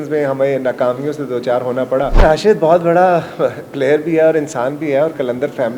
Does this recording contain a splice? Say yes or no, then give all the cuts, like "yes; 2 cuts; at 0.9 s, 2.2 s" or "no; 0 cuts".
yes; 1 cut; at 2.2 s